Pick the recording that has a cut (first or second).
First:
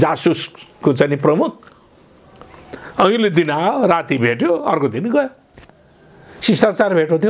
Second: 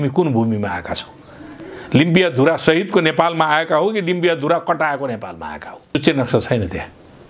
second